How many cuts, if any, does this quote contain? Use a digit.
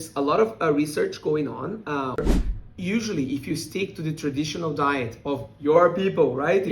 1